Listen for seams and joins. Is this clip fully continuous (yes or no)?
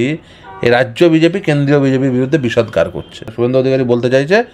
no